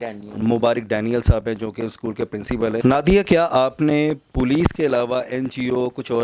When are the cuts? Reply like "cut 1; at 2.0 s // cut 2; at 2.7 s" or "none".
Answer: cut 1; at 2.8 s